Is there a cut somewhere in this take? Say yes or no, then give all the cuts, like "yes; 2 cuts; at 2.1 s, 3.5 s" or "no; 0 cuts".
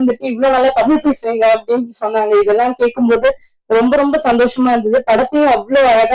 no; 0 cuts